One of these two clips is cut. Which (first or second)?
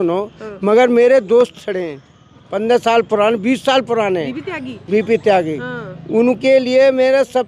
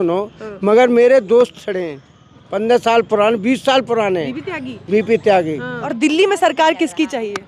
second